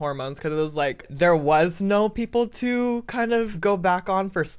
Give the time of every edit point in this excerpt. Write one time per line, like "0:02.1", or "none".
0:01.1
0:03.5